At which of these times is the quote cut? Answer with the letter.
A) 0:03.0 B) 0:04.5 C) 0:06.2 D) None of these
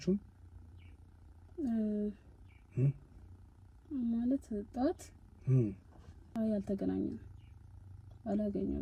D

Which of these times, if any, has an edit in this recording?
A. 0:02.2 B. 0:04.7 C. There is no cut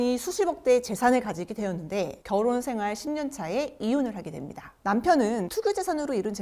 C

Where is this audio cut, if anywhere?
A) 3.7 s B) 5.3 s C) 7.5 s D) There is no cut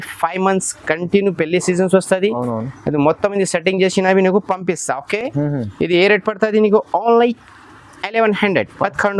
D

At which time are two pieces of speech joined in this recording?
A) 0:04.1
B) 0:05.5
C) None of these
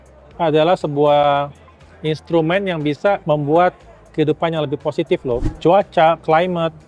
B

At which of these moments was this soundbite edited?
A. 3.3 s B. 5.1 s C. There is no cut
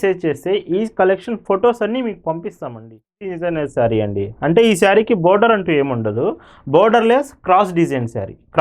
A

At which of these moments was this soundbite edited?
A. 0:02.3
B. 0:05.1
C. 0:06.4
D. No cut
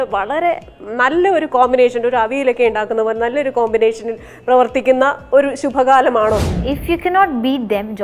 C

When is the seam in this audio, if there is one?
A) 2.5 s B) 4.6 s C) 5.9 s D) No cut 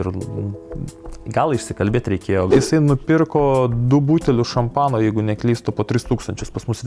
A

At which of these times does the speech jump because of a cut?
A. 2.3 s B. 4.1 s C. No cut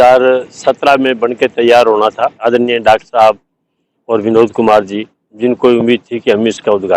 A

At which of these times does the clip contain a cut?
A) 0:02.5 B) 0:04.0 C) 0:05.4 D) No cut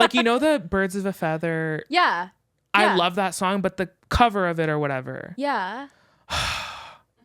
B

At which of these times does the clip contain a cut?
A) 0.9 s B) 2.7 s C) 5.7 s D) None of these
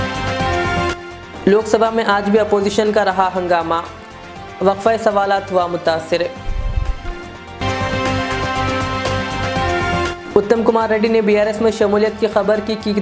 A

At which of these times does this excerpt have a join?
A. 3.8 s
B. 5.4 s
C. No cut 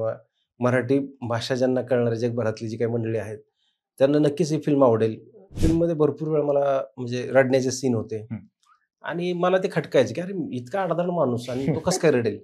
B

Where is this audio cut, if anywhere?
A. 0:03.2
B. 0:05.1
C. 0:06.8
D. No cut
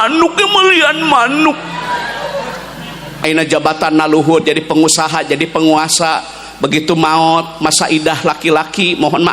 A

